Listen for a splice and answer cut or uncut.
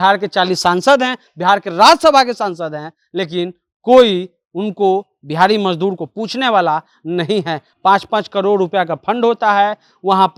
uncut